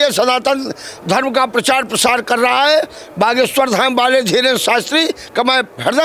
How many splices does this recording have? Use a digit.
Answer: 0